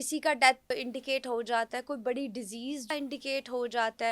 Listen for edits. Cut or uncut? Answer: cut